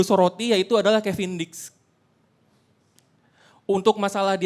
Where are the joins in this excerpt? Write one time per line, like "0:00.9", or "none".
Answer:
none